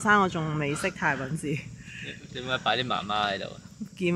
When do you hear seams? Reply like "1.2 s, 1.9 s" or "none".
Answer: none

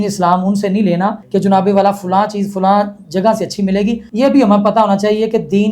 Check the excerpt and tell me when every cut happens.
1.2 s, 4.1 s

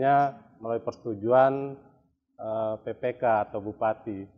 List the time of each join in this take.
none

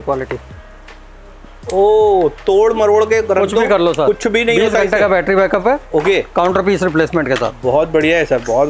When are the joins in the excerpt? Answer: none

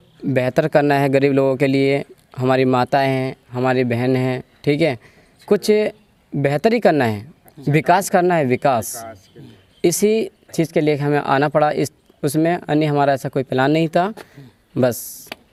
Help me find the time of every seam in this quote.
none

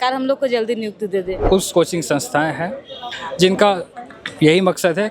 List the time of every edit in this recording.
1.4 s

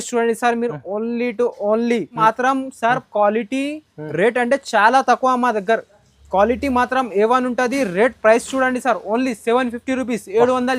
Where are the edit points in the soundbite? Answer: 2.2 s

